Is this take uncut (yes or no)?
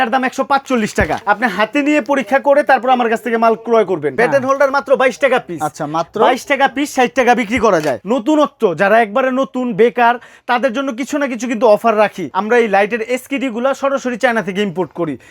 no